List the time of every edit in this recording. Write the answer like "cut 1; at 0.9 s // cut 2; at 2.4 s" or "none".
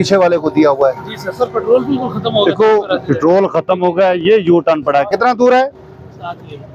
none